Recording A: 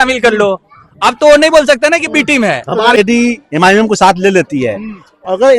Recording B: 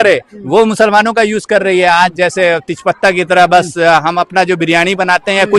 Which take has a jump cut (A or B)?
A